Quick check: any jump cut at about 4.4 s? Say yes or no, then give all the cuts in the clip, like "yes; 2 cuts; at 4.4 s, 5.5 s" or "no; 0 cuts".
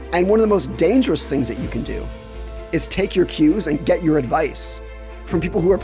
no; 0 cuts